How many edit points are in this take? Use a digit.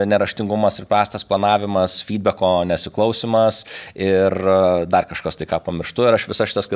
0